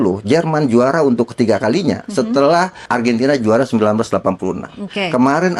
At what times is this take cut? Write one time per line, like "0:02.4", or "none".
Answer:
0:02.8